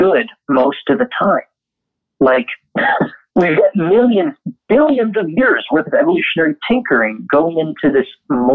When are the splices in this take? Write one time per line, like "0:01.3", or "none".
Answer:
0:03.2